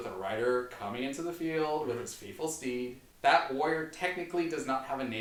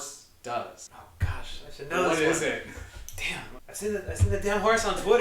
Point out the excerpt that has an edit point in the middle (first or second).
second